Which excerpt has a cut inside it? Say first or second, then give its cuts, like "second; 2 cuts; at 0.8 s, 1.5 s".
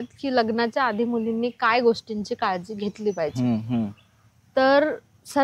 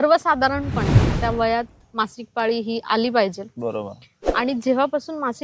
second; 1 cut; at 1.2 s